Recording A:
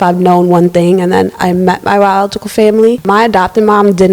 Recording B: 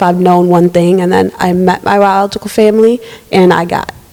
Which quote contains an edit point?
A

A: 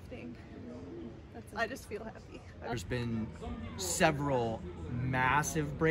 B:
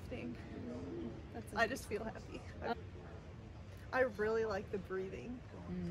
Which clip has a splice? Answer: A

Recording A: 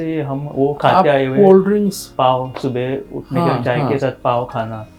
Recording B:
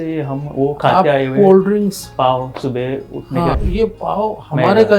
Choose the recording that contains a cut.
B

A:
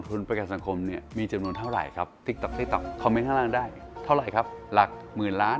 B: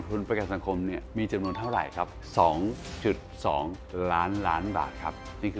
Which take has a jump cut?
B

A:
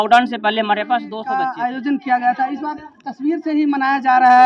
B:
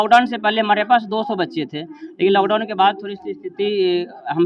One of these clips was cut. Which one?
A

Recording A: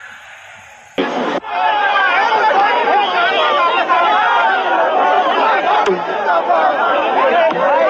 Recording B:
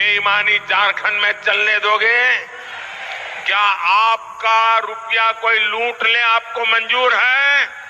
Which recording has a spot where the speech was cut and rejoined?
A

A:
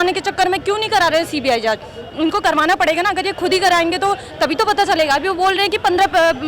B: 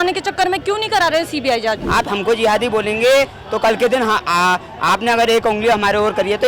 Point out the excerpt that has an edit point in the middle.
B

